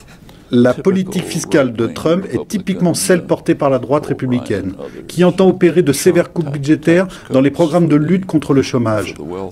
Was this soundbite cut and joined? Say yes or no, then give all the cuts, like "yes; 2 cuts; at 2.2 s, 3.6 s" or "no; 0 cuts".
no; 0 cuts